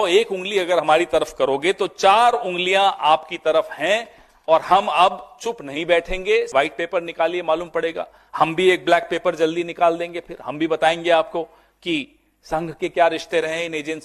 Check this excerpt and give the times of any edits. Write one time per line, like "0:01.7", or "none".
0:06.5